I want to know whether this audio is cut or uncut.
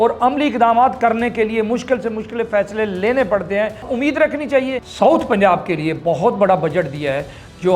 cut